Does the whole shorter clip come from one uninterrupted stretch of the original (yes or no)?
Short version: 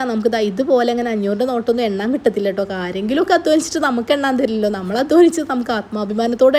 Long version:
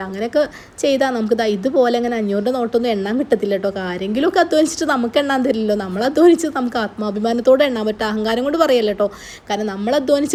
yes